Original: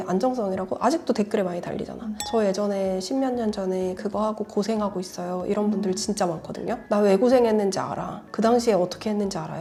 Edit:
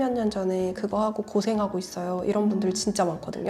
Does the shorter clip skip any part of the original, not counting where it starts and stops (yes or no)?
no